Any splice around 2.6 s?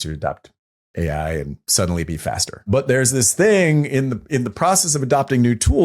yes; 1 cut; at 2.6 s

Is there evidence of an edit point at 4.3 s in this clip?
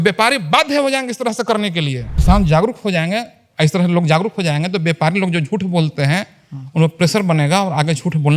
no; 1 cut; at 2.0 s

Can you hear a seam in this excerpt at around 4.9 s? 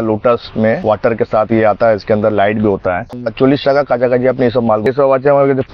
yes; 2 cuts; at 3.1 s, 4.9 s

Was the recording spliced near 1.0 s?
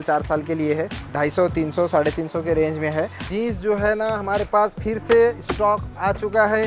yes; 2 cuts; at 1.0 s, 3.2 s

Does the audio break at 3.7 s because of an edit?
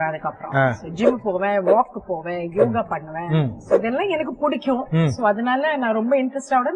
no; 0 cuts

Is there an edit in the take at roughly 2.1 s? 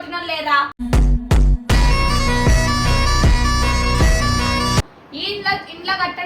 no; 1 cut; at 4.8 s

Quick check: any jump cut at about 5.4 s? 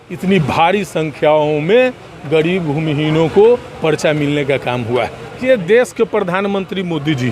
yes; 1 cut; at 5.4 s

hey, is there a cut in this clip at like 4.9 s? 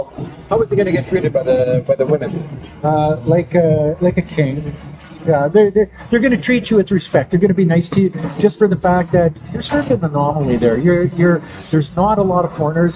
no; 0 cuts

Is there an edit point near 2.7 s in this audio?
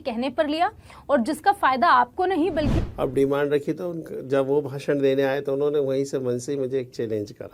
yes; 1 cut; at 2.7 s

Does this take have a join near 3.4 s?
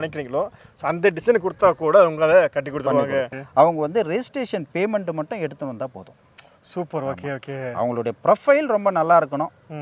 yes; 1 cut; at 3.4 s

